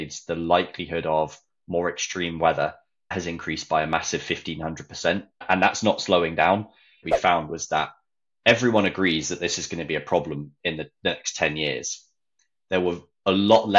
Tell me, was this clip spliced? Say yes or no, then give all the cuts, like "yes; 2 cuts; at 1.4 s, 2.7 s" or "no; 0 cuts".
yes; 3 cuts; at 3.1 s, 5.4 s, 7.0 s